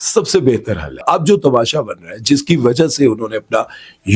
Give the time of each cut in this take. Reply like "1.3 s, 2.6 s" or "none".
1.0 s